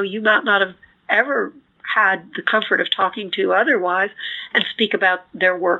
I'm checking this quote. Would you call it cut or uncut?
uncut